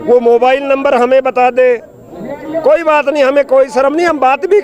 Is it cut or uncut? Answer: uncut